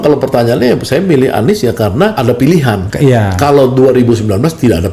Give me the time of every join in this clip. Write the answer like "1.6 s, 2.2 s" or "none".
2.2 s, 2.9 s